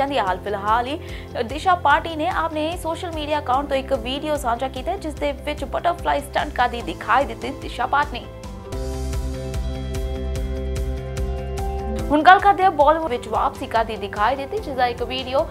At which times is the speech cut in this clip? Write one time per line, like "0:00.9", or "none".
0:13.1